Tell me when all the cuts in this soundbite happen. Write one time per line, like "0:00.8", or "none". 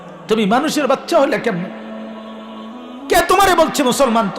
0:01.7
0:03.1